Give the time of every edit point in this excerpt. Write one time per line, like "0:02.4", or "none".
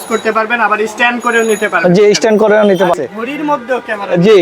0:02.9